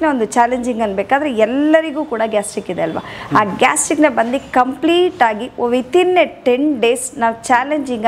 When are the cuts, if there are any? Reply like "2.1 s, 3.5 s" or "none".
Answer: none